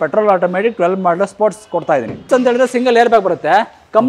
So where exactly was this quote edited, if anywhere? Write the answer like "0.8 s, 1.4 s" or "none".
2.3 s